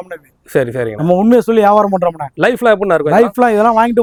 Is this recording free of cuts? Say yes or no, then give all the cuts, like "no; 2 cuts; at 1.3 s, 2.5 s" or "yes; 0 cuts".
yes; 0 cuts